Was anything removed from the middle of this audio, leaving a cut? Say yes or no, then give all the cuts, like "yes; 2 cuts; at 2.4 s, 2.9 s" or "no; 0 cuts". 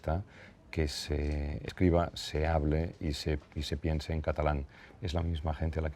yes; 1 cut; at 1.6 s